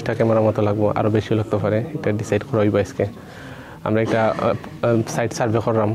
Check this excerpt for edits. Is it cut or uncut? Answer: uncut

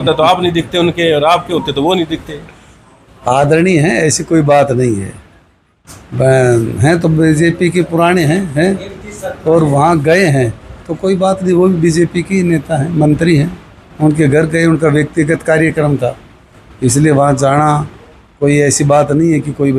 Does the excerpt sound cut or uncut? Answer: uncut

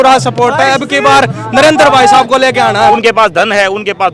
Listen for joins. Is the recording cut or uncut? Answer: cut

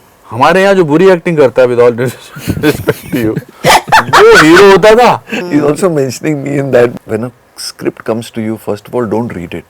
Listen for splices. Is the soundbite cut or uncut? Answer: cut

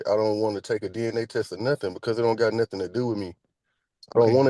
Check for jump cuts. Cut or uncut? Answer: uncut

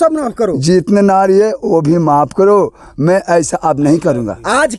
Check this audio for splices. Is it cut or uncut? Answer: uncut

